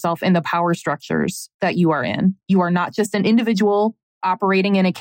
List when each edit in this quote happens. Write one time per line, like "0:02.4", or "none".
0:02.4
0:04.0